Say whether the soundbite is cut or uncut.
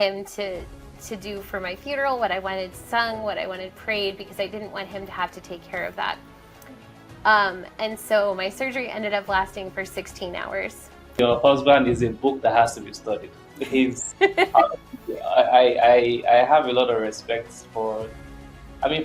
cut